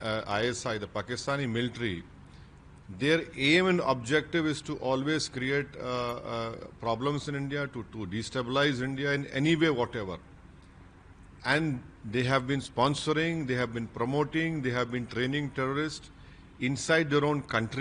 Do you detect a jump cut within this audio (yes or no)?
no